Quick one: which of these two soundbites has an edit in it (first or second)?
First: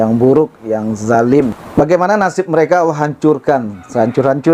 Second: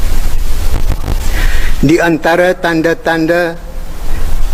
first